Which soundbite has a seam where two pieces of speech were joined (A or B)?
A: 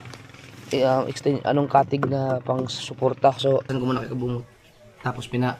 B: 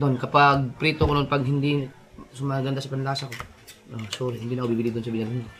A